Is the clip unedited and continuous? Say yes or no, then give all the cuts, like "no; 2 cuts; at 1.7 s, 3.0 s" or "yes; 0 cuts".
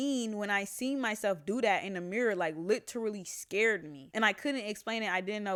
yes; 0 cuts